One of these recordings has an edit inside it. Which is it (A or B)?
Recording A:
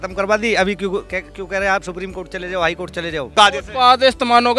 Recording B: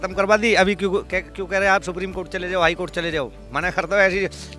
A